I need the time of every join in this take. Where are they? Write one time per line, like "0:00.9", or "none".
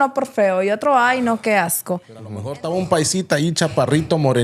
0:02.5